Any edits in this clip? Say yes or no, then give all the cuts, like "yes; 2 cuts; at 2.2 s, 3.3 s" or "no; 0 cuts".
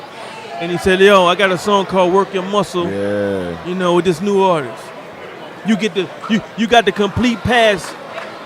yes; 1 cut; at 1.8 s